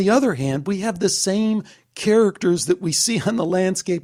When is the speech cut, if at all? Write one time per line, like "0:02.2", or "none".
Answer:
none